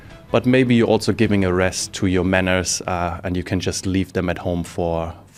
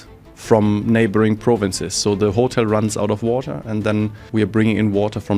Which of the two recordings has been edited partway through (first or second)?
second